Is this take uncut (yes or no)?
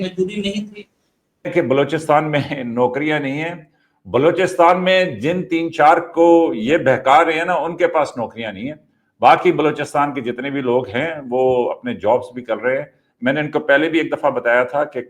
no